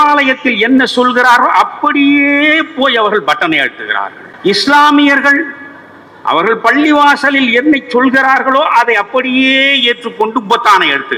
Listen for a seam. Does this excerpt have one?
no; 0 cuts

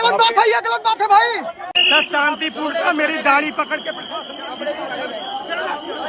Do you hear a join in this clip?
yes; 1 cut; at 1.7 s

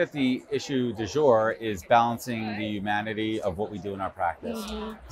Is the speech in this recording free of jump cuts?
yes; 0 cuts

